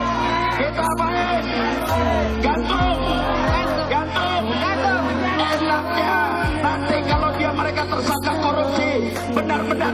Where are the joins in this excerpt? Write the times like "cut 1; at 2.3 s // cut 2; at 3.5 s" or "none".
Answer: none